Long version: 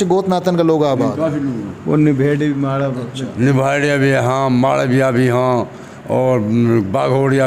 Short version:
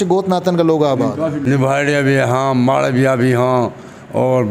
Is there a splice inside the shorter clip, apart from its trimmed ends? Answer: yes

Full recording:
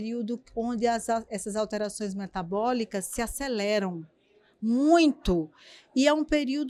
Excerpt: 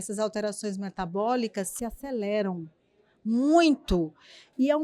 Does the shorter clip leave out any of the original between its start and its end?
no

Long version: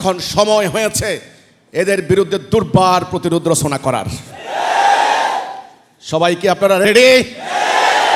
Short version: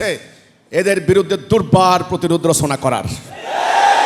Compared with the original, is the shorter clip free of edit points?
yes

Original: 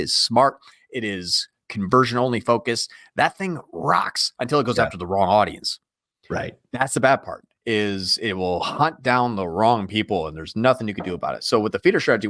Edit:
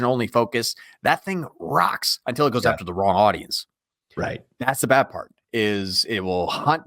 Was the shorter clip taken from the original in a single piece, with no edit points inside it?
yes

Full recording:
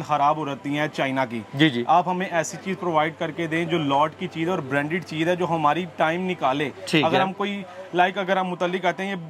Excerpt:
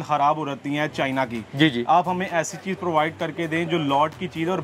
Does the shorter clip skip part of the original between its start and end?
no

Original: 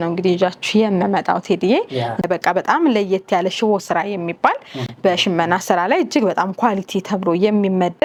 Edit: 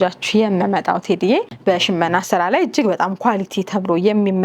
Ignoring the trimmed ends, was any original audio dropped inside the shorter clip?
yes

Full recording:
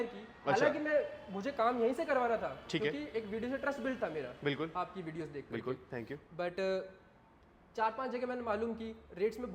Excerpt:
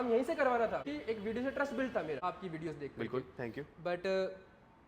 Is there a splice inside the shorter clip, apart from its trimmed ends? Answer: yes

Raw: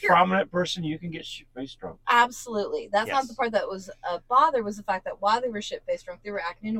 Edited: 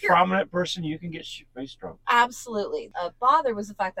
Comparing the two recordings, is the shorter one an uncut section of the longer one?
no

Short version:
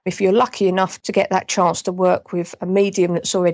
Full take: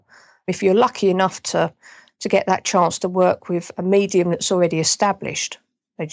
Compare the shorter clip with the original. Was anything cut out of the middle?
yes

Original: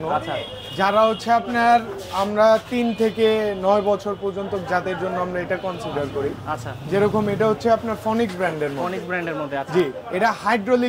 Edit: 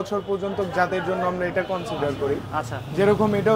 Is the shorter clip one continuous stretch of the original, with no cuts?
yes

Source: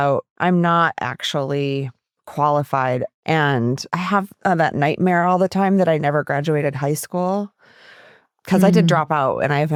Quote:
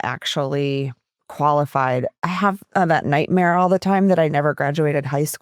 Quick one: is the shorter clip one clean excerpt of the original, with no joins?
no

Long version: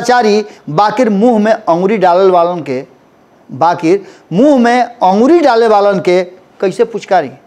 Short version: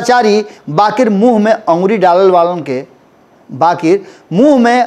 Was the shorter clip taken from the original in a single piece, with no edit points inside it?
yes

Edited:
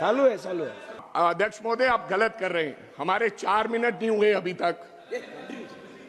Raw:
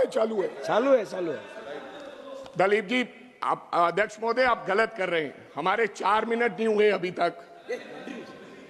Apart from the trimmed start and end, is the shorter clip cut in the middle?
yes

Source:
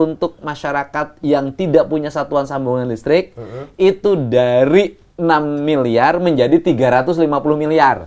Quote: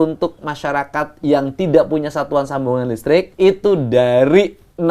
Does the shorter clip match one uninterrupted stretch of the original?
no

